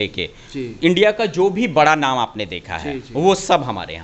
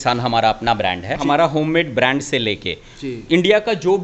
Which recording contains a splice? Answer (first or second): second